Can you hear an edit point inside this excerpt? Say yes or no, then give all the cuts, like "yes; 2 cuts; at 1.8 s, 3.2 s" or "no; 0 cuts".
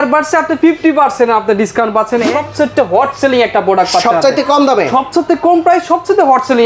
yes; 1 cut; at 2.2 s